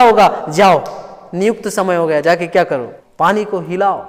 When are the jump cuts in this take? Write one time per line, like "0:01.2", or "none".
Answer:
0:03.0